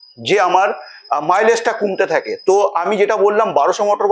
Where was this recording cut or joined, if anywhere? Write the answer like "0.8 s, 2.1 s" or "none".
none